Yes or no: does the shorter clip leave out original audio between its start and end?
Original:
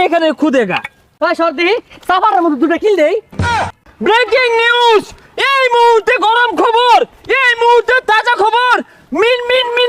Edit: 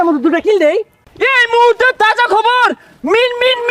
yes